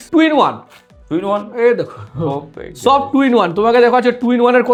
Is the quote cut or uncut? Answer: uncut